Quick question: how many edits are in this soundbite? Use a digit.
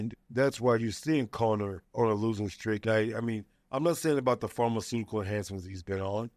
2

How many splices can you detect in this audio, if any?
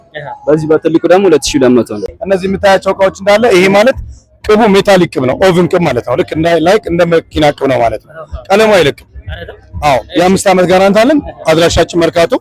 1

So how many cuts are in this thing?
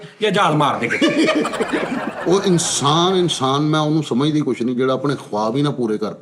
1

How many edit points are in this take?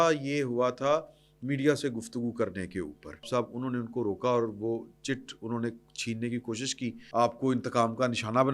2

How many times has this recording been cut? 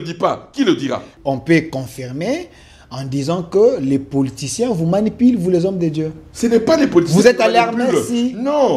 1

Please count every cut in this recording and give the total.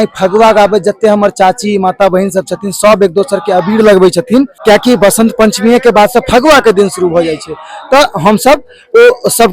1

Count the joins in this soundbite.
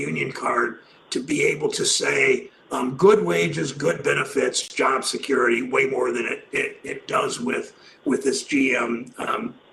0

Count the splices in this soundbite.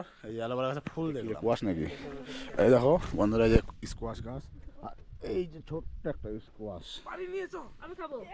1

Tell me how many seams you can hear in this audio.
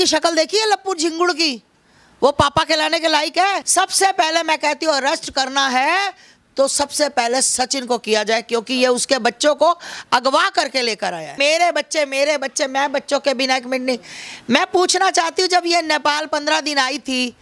2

